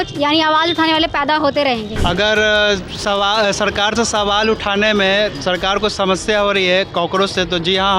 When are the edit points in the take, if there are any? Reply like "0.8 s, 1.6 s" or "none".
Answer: 1.9 s